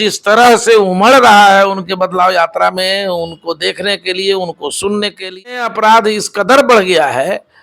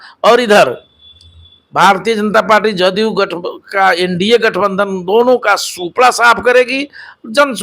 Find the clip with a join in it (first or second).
first